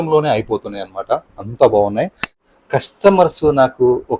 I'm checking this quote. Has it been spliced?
yes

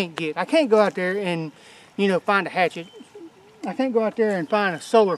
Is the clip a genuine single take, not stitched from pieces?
yes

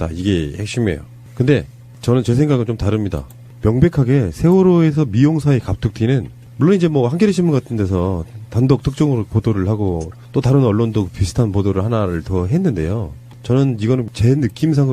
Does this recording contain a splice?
yes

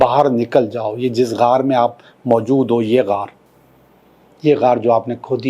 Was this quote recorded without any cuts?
yes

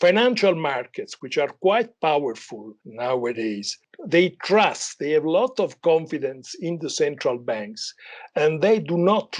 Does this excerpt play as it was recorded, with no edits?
no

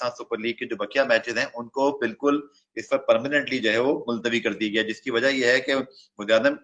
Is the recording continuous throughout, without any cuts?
yes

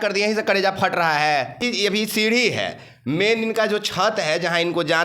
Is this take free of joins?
no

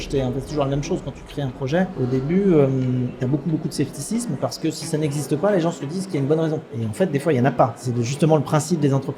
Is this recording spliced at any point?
yes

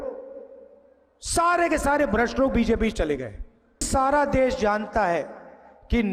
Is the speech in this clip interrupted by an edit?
yes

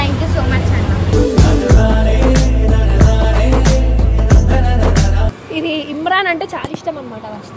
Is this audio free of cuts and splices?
no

